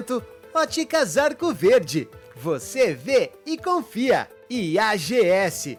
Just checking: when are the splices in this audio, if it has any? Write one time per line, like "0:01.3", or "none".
none